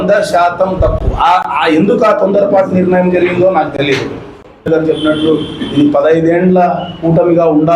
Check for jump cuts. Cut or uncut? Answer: cut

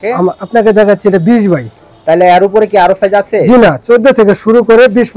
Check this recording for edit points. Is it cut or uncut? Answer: uncut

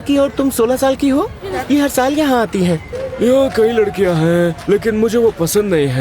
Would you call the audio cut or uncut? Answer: cut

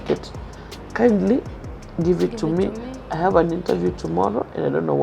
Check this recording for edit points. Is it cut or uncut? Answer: uncut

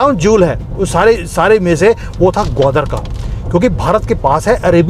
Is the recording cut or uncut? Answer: uncut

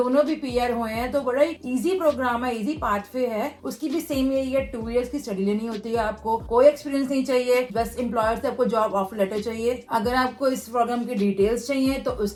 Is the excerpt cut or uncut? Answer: uncut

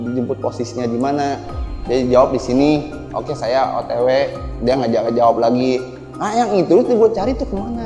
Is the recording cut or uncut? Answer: uncut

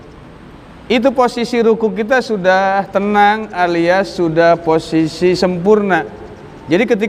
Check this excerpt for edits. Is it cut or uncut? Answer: uncut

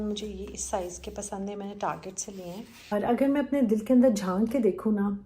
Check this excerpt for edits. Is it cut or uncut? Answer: cut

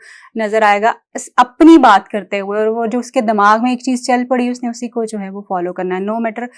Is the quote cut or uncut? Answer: uncut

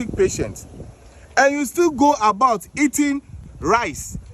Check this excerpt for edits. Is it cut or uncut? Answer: cut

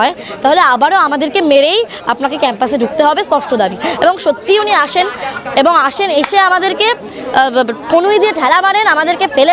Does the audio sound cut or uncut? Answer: uncut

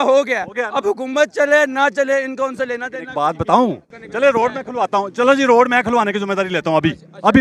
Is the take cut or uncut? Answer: cut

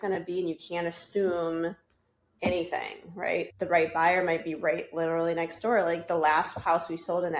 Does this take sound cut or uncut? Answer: cut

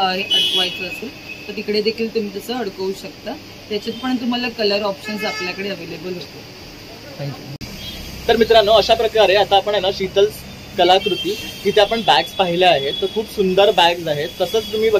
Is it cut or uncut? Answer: uncut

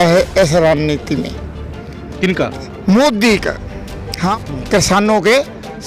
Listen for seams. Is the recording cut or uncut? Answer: cut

